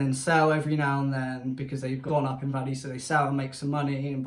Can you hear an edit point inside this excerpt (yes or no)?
yes